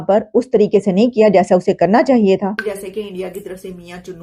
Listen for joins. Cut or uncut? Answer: cut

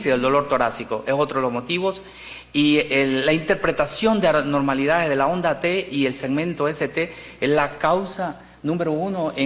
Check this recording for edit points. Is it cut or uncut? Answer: uncut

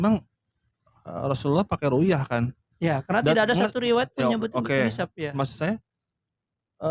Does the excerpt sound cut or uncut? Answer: uncut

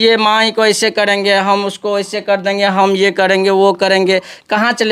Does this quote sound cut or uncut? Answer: uncut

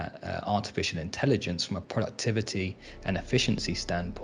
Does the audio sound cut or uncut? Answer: cut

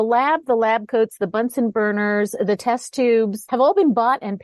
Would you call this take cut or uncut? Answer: cut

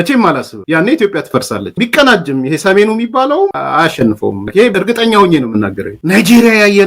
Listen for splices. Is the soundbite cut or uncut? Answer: cut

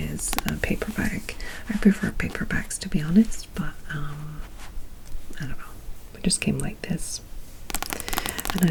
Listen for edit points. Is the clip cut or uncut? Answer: uncut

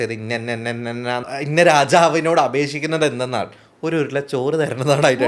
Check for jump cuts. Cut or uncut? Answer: cut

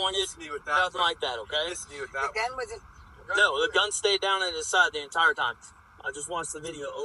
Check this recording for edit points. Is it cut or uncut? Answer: uncut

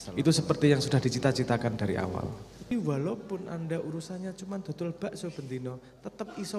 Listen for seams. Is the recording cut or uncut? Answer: cut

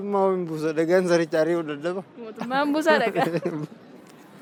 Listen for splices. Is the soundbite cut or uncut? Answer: uncut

